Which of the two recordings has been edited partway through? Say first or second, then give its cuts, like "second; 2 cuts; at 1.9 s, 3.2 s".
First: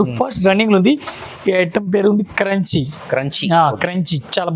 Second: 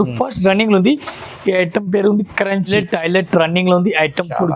second; 1 cut; at 2.7 s